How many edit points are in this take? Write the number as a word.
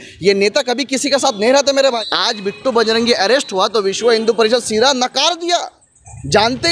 one